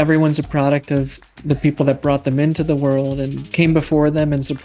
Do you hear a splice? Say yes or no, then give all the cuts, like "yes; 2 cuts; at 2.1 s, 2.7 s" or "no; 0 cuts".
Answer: no; 0 cuts